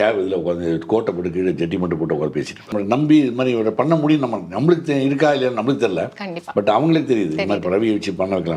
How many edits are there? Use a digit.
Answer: 1